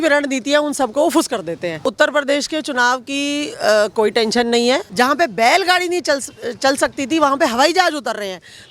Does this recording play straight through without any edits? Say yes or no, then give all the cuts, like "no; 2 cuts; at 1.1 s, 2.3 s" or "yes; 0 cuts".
no; 2 cuts; at 1.8 s, 4.9 s